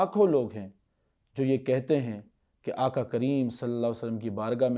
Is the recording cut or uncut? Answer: uncut